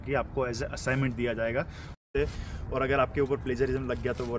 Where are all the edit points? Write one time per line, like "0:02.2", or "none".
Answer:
0:01.9